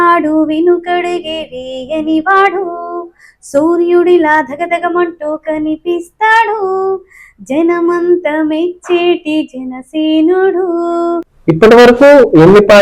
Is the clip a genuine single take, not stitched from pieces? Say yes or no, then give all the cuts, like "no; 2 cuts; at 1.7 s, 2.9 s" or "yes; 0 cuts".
no; 1 cut; at 11.3 s